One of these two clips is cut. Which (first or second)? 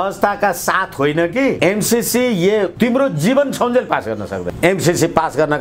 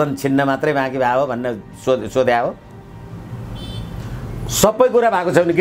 first